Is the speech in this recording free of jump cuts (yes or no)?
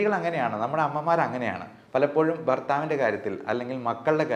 yes